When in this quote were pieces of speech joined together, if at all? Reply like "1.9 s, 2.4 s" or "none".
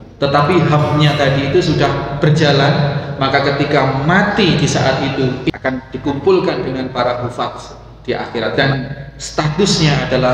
5.5 s, 8.5 s